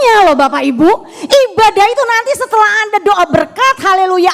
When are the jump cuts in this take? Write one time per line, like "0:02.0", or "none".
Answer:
none